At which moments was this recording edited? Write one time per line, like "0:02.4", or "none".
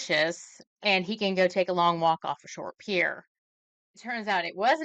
0:03.9